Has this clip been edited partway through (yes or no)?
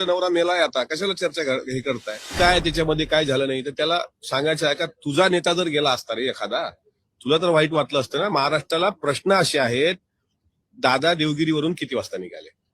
yes